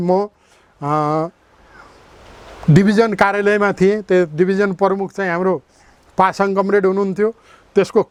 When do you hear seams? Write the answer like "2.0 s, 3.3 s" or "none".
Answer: none